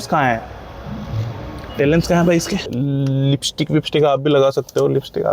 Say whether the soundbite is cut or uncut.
cut